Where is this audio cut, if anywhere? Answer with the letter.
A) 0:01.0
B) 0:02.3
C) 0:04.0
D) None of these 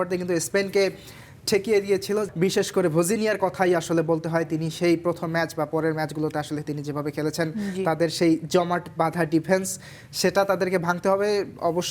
B